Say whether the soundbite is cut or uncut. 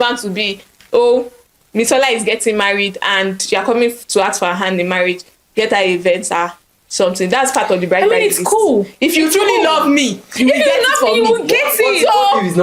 uncut